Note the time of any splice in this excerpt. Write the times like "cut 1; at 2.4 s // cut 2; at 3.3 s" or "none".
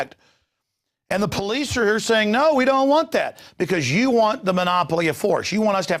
cut 1; at 3.7 s

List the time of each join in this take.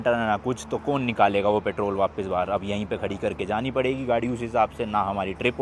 none

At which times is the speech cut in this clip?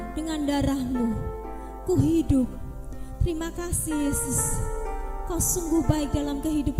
none

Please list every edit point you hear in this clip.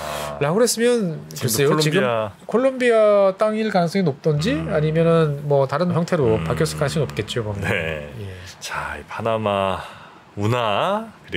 none

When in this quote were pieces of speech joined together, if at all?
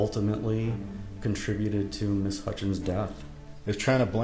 cut 1; at 3.1 s

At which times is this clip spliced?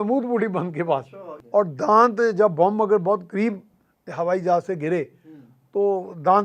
cut 1; at 1.0 s

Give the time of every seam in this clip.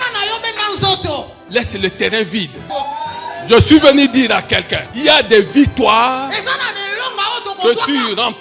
cut 1; at 1.4 s // cut 2; at 2.7 s // cut 3; at 4.8 s

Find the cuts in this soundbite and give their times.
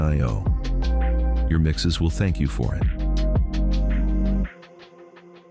none

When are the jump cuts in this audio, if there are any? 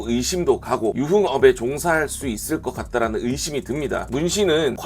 cut 1; at 0.9 s // cut 2; at 4.0 s

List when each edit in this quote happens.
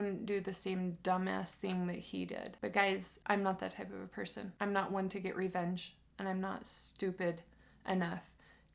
none

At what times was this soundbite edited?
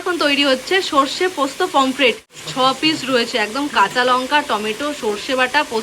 none

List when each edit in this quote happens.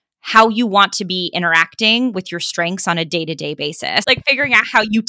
cut 1; at 4.0 s

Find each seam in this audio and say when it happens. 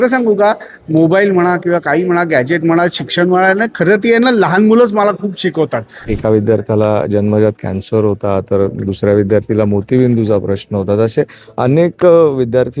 cut 1; at 6.0 s

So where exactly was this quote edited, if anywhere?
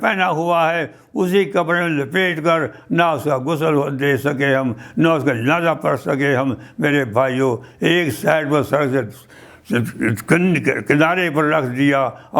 none

